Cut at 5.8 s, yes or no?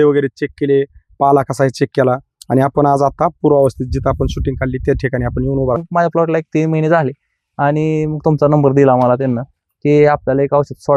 yes